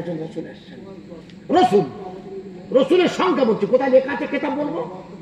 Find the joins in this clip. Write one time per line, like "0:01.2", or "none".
none